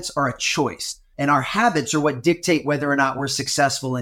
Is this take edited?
yes; 1 cut; at 1.1 s

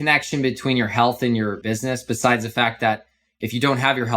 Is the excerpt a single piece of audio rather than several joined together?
no; 1 cut; at 1.6 s

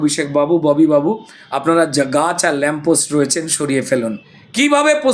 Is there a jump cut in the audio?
yes; 1 cut; at 4.0 s

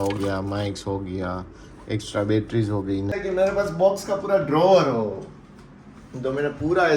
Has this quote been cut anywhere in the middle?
yes; 1 cut; at 3.1 s

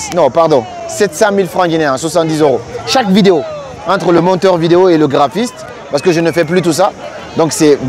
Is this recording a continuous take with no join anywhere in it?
yes; 0 cuts

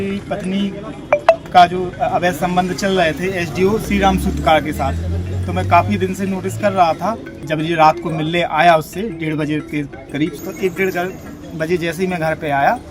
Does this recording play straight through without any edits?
no; 3 cuts; at 3.8 s, 7.4 s, 10.4 s

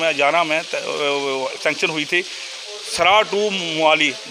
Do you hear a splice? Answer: no; 0 cuts

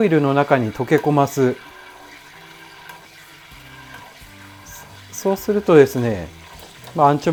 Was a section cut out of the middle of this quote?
no; 0 cuts

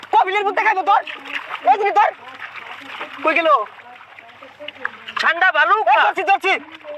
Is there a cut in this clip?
no; 0 cuts

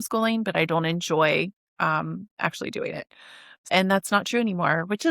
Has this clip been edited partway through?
yes; 1 cut; at 3.7 s

